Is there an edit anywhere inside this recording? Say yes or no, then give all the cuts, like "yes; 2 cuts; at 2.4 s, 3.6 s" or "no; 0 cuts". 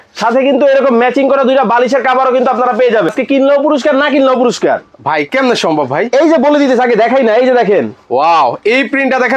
yes; 1 cut; at 3.1 s